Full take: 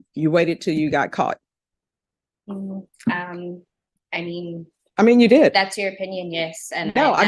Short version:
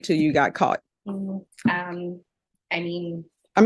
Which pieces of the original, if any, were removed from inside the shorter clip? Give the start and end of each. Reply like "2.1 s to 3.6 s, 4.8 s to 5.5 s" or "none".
1.5 s to 2.4 s